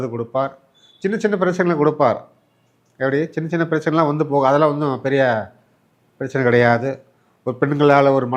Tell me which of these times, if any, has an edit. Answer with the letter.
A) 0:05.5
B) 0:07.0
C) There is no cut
C